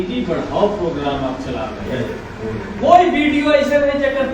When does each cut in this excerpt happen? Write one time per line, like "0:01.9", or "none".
0:01.9